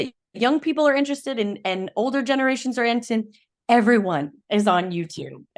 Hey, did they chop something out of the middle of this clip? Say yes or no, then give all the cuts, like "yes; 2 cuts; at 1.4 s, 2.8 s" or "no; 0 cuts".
no; 0 cuts